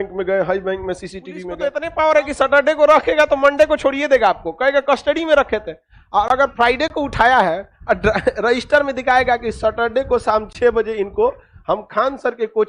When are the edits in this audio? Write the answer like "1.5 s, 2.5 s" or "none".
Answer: 1.5 s